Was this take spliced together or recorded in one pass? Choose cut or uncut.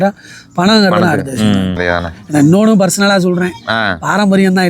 cut